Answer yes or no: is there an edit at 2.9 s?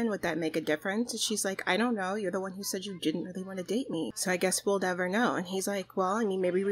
no